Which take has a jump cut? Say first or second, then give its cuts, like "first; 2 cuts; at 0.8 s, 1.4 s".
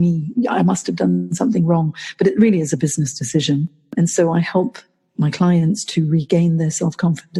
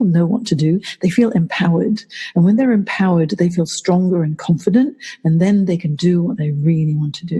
first; 1 cut; at 3.9 s